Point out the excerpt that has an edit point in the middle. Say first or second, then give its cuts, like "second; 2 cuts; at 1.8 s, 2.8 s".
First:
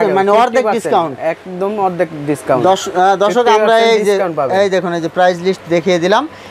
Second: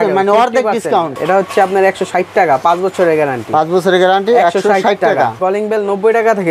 second; 2 cuts; at 1.2 s, 5.4 s